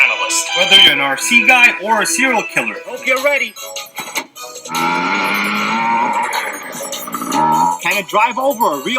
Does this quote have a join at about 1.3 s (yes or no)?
no